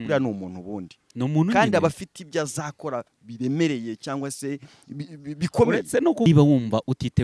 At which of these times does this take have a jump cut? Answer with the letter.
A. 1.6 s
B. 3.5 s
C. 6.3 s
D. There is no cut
C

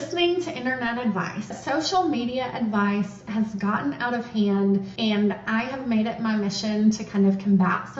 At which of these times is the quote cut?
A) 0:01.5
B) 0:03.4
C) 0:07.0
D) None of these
A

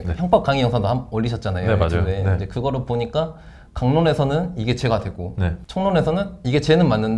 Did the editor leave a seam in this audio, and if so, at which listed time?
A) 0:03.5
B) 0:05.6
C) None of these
B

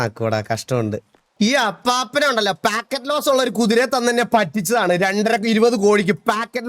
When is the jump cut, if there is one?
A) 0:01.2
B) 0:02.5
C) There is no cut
A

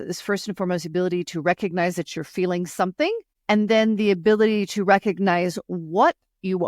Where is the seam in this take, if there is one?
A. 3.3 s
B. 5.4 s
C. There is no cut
A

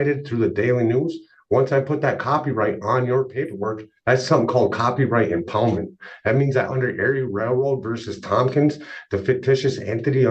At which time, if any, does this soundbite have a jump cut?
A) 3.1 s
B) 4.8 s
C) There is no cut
C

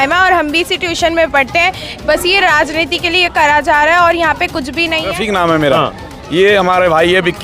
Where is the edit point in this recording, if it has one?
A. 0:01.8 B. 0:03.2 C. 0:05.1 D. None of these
C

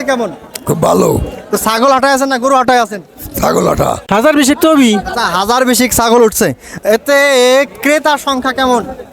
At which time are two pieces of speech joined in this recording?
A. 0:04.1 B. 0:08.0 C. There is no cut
A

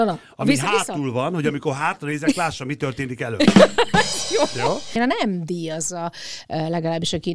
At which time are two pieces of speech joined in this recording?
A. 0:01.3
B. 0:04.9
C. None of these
B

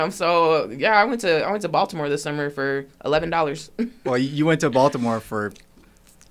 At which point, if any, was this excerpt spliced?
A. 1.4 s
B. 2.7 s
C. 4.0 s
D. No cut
C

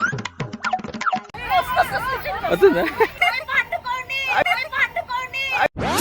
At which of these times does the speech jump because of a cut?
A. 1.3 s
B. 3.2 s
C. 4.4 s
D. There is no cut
B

